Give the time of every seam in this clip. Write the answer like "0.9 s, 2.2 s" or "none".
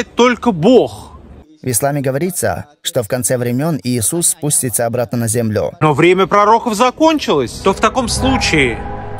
5.8 s, 7.5 s